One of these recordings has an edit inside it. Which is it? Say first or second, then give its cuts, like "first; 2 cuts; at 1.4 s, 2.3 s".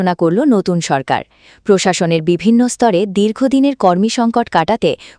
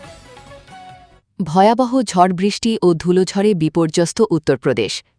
second; 1 cut; at 1.2 s